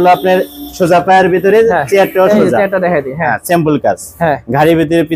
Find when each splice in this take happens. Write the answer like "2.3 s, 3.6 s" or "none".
none